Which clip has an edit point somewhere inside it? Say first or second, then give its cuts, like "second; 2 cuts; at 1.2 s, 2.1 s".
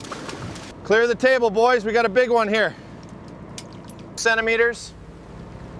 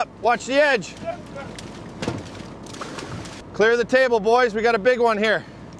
first; 1 cut; at 4.2 s